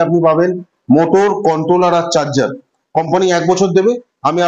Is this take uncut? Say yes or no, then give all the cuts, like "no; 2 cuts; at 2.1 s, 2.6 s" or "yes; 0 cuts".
yes; 0 cuts